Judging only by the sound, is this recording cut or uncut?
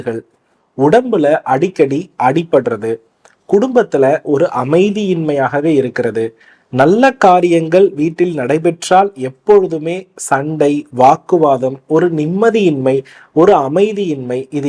uncut